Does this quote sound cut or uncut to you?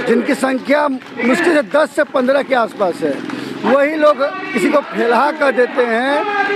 uncut